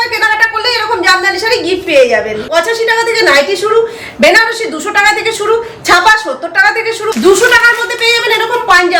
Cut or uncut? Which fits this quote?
cut